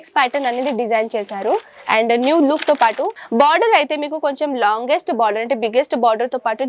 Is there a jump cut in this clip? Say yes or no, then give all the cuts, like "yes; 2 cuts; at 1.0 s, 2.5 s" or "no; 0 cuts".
yes; 1 cut; at 3.2 s